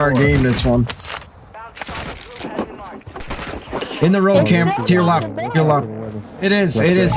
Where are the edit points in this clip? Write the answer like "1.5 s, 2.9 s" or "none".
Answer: none